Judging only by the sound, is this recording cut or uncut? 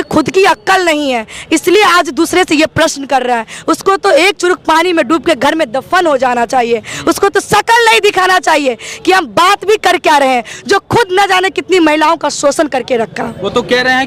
uncut